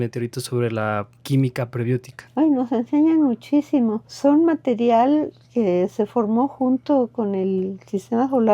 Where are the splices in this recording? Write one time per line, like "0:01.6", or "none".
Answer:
0:01.1
0:02.2
0:04.1